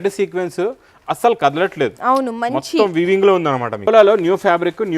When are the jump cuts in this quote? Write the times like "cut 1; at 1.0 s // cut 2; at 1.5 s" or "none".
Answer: cut 1; at 3.9 s

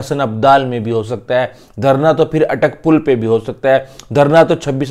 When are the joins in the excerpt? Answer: none

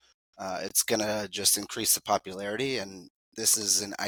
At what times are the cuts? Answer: none

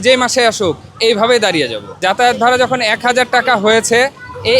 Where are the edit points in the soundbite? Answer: cut 1; at 2.0 s

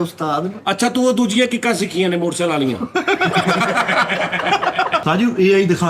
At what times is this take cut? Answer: cut 1; at 5.0 s

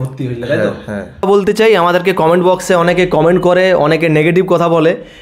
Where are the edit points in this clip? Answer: cut 1; at 1.2 s

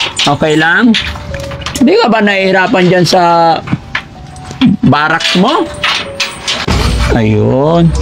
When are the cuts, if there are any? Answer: cut 1; at 6.6 s

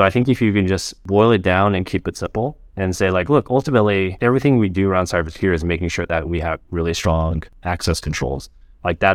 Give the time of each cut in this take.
cut 1; at 0.9 s // cut 2; at 4.2 s // cut 3; at 7.5 s

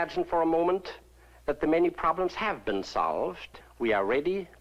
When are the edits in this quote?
none

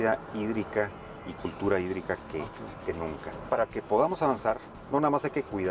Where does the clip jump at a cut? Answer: cut 1; at 3.3 s

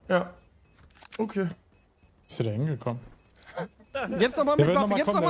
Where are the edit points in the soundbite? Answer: cut 1; at 4.0 s

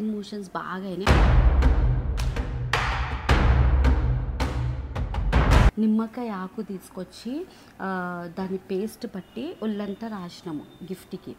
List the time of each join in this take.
cut 1; at 5.7 s

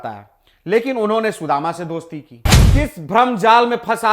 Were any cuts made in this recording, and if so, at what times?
cut 1; at 2.5 s

